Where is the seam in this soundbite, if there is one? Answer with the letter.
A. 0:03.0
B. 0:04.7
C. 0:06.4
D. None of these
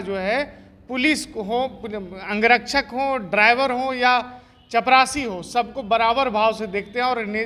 D